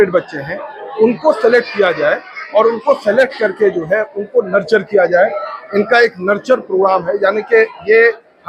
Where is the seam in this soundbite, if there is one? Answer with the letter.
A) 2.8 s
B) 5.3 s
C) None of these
C